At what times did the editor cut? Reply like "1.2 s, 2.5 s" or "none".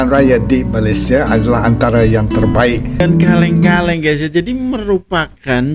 3.0 s